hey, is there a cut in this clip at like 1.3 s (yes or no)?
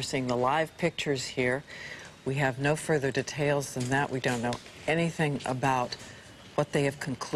no